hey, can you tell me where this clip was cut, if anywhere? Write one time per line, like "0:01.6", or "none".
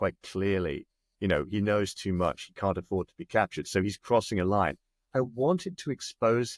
none